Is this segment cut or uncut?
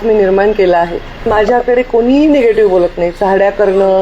cut